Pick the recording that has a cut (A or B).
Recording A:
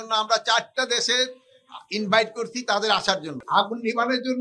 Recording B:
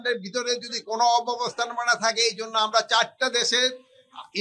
A